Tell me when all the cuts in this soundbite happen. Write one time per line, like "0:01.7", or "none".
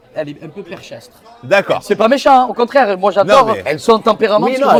none